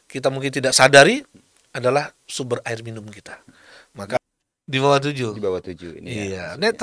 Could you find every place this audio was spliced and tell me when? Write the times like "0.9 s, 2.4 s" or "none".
4.2 s